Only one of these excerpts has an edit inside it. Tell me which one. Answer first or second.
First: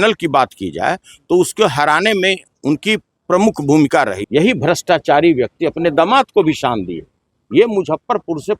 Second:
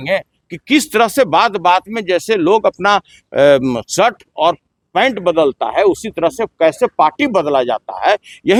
first